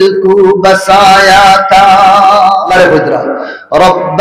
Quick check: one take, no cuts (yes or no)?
no